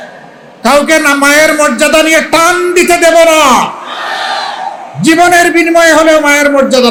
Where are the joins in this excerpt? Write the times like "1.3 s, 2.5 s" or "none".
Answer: none